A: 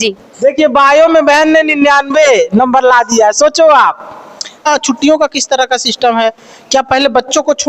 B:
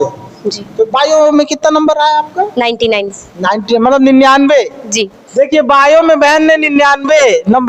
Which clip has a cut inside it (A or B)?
A